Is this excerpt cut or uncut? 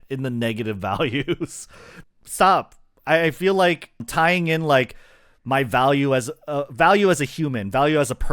cut